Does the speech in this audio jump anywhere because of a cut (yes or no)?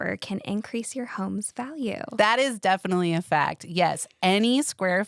yes